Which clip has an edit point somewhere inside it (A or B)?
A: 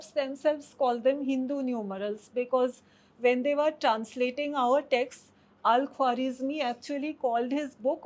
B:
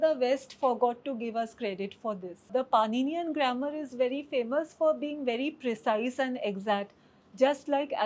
B